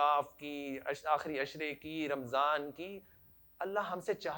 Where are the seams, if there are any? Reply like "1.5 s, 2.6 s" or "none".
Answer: none